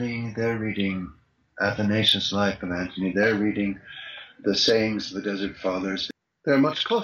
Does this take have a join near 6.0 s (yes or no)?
yes